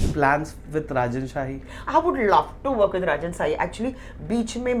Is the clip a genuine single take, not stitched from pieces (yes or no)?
yes